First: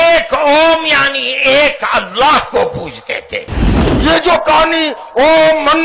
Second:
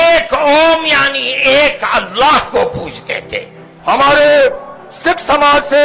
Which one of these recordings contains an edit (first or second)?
first